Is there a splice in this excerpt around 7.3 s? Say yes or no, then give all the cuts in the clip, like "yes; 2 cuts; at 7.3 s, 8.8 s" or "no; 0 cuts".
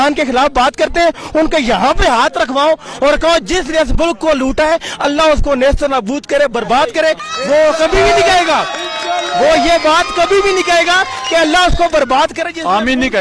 yes; 1 cut; at 7.3 s